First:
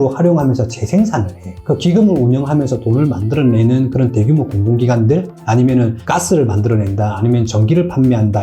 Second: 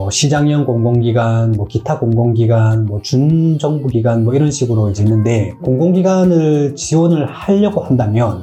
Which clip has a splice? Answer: first; 1 cut; at 1.5 s

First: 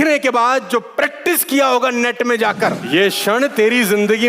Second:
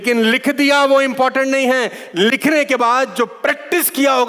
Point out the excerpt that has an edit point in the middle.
first; 1 cut; at 2.8 s

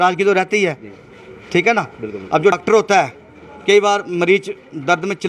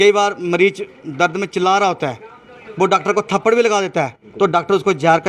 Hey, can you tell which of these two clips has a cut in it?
first; 1 cut; at 2.6 s

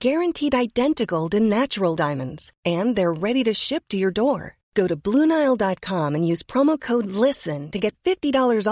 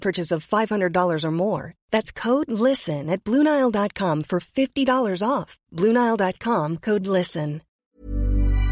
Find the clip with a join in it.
second; 1 cut; at 7.7 s

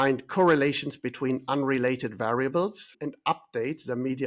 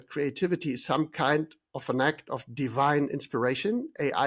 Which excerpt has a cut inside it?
first; 1 cut; at 2.9 s

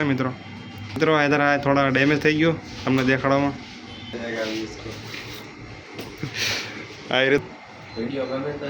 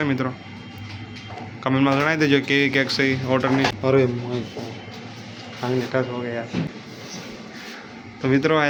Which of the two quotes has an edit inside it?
first; 3 cuts; at 1.0 s, 4.1 s, 7.4 s

